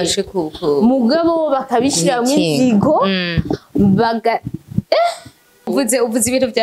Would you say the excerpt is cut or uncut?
cut